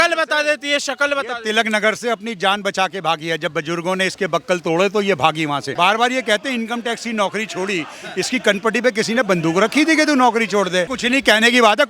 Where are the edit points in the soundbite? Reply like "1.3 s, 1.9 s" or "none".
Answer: 5.7 s, 11.0 s